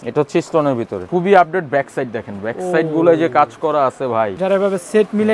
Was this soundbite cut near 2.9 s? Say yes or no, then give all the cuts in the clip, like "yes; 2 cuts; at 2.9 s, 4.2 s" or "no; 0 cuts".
no; 2 cuts; at 1.0 s, 4.3 s